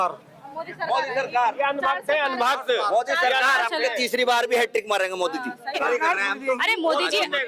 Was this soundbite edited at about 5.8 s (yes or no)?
yes